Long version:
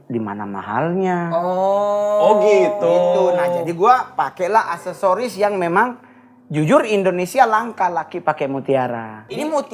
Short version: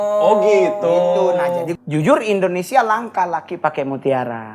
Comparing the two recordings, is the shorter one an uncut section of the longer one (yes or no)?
no